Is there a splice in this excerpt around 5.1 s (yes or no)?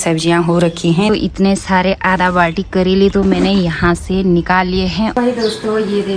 yes